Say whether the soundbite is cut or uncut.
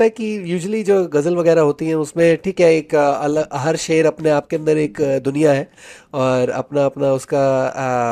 uncut